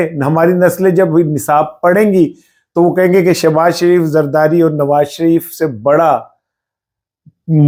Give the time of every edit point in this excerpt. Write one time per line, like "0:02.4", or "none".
none